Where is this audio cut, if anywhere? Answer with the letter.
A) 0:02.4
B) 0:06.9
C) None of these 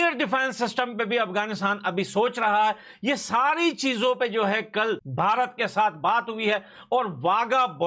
C